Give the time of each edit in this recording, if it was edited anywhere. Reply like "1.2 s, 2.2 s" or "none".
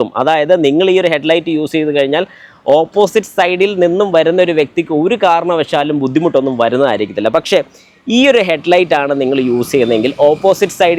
none